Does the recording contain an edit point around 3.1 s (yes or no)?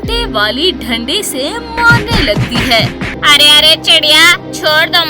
yes